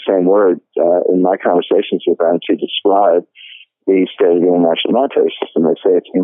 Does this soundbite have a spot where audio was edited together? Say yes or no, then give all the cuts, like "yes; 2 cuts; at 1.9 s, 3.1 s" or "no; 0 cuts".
no; 0 cuts